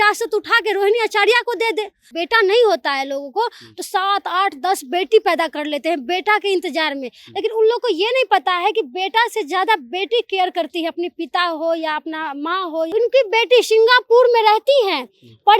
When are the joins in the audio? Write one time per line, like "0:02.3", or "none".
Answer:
0:02.1
0:12.9